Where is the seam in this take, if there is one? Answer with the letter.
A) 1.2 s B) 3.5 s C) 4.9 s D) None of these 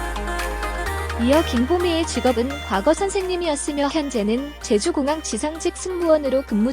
A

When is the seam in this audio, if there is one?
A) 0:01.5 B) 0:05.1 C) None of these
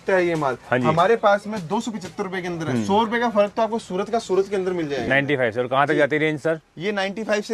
B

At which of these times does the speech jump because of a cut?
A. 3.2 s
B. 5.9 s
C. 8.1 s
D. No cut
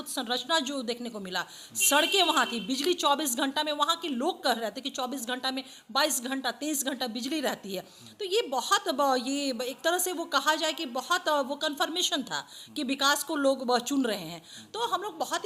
D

